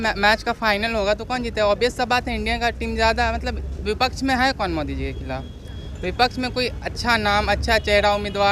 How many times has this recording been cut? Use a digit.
0